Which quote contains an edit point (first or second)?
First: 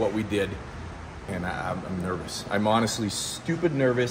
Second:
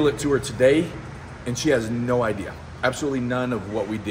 first